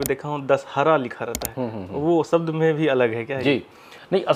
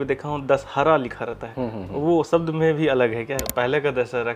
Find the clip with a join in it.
second; 1 cut; at 3.3 s

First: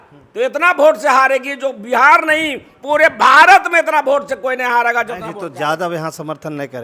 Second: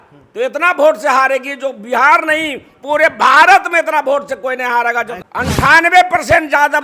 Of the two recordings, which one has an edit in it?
second; 1 cut; at 5.2 s

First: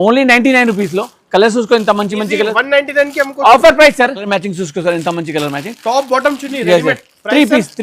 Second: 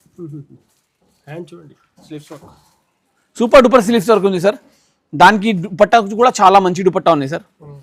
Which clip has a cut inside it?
first; 1 cut; at 4.3 s

